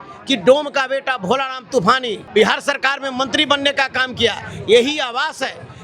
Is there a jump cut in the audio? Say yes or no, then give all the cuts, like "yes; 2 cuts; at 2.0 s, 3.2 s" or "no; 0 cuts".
yes; 1 cut; at 2.2 s